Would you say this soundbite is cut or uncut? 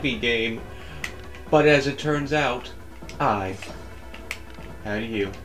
uncut